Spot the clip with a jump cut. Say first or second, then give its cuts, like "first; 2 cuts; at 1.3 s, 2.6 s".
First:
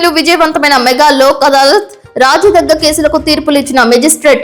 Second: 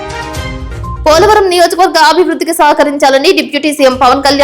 second; 1 cut; at 1.0 s